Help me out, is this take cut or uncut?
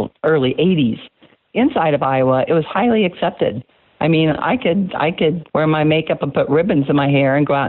cut